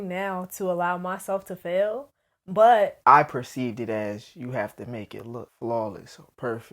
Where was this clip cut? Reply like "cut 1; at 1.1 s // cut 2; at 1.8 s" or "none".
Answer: cut 1; at 3.0 s // cut 2; at 5.5 s